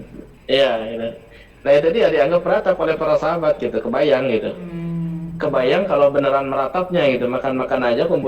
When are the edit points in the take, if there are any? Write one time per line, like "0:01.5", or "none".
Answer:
none

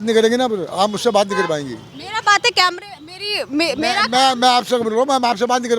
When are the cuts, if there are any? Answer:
none

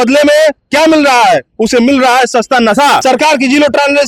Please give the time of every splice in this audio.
0:03.0

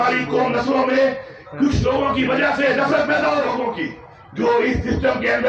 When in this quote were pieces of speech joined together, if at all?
0:03.6

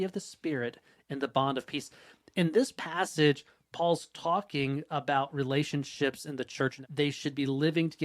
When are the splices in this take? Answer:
0:06.8

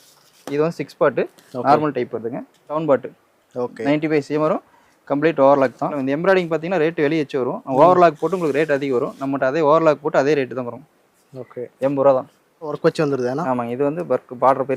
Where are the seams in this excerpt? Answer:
0:02.8
0:06.0
0:12.8

